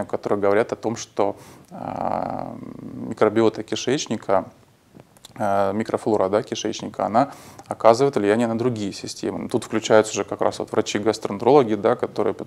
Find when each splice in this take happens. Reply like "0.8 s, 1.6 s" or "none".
9.4 s